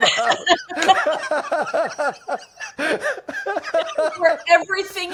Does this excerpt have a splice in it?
no; 0 cuts

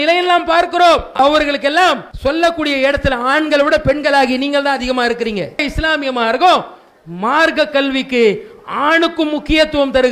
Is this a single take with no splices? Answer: no; 3 cuts; at 1.1 s, 2.1 s, 5.6 s

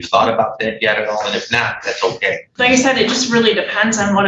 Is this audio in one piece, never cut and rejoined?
no; 1 cut; at 2.5 s

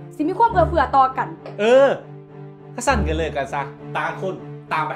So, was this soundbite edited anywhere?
yes; 1 cut; at 1.4 s

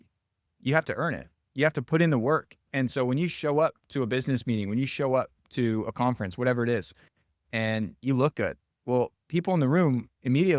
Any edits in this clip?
yes; 1 cut; at 8.7 s

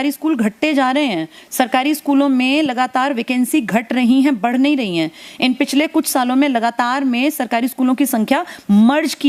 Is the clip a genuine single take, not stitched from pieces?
yes; 0 cuts

